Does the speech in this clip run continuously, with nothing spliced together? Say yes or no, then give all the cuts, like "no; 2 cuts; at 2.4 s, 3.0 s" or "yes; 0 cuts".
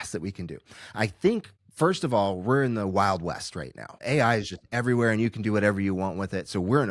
no; 2 cuts; at 1.6 s, 3.9 s